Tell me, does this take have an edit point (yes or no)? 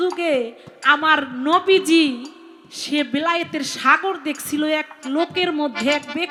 no